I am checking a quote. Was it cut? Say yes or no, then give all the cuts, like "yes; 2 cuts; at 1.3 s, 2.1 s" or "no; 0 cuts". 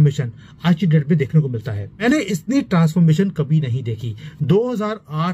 yes; 1 cut; at 2.0 s